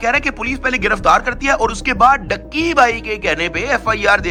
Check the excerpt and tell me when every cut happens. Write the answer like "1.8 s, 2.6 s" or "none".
none